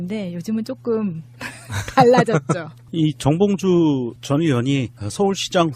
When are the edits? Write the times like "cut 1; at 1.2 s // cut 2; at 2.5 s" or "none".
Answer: cut 1; at 1.0 s